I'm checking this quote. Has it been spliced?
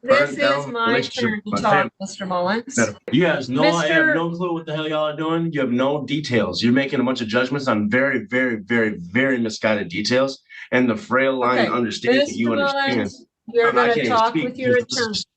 yes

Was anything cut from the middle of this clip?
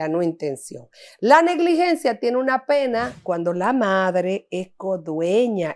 yes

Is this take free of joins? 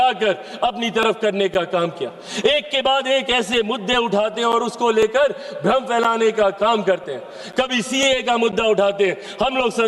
yes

